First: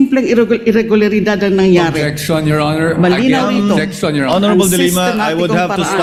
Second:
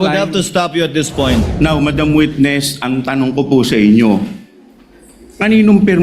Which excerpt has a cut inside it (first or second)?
second